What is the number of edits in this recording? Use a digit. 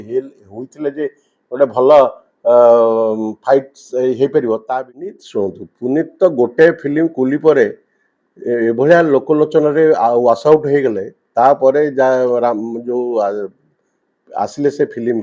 1